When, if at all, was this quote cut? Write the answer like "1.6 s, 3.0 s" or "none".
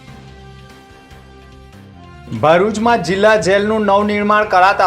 1.0 s